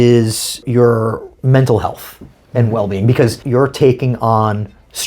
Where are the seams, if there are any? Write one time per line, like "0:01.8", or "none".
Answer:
0:01.3
0:03.4